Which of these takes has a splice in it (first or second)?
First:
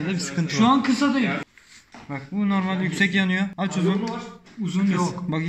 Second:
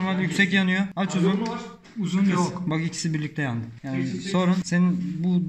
first